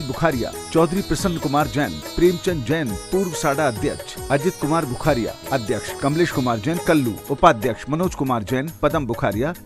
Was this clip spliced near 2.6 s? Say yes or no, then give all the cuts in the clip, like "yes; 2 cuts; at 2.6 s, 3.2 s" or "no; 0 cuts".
no; 2 cuts; at 5.9 s, 7.2 s